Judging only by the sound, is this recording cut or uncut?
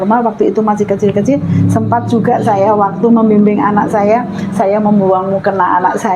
uncut